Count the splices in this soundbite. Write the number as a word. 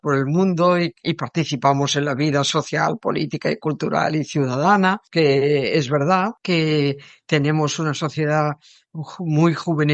two